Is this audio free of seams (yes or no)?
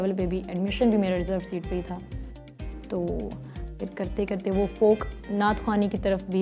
yes